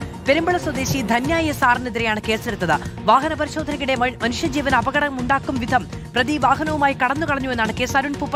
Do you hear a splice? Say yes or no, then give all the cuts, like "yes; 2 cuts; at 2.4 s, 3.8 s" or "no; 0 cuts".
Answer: no; 0 cuts